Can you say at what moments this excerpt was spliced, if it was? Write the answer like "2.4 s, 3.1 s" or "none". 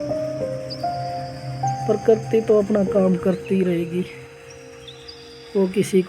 1.9 s